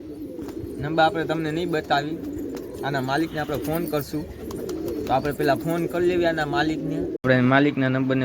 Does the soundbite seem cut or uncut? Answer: cut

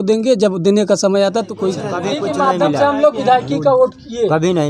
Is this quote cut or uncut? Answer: cut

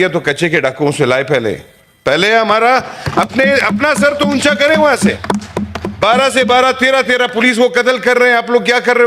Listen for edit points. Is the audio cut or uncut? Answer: uncut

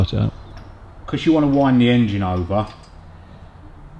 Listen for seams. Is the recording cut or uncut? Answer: uncut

